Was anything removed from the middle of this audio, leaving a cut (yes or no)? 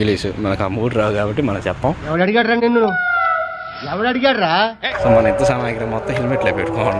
yes